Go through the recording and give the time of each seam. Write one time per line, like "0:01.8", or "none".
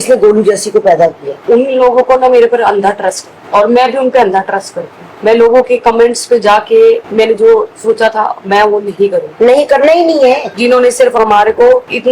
0:01.3
0:10.5